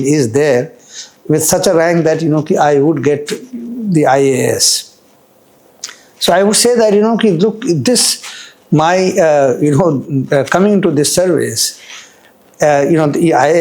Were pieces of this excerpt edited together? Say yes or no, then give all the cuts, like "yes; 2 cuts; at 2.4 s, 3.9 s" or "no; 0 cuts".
no; 0 cuts